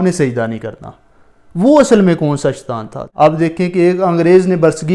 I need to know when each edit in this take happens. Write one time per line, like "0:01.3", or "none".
0:03.0